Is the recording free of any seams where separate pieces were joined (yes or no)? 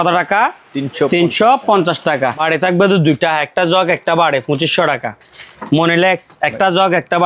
no